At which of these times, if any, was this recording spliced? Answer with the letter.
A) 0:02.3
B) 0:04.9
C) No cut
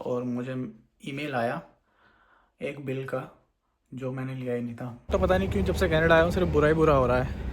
B